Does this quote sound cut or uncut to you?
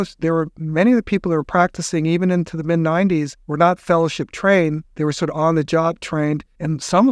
cut